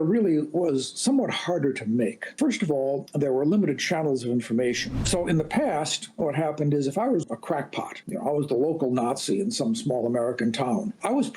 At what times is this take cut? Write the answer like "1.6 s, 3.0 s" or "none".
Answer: 2.3 s, 4.9 s